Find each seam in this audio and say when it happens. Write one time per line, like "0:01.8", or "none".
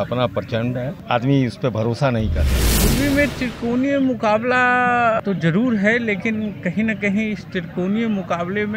0:01.0
0:02.7
0:05.2